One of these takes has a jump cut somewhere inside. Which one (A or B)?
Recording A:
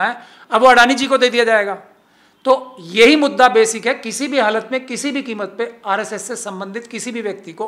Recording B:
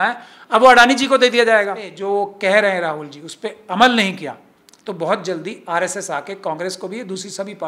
B